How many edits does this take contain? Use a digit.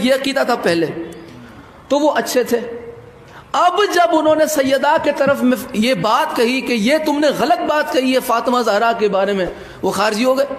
0